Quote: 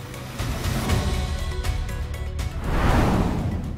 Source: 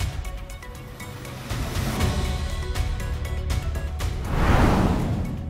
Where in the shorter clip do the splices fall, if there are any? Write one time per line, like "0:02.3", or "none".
0:02.6